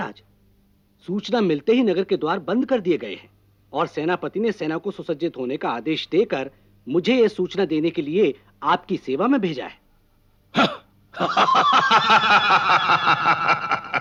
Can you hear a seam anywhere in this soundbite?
no; 0 cuts

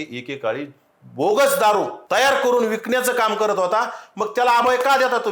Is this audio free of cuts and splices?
yes; 0 cuts

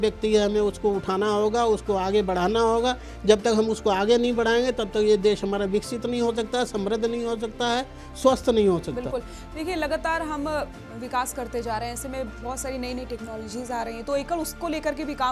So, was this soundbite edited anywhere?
no; 0 cuts

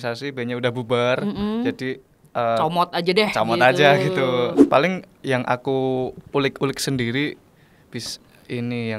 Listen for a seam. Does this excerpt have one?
yes; 1 cut; at 4.6 s

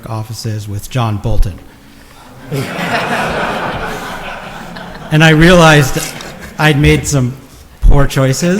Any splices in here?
no; 0 cuts

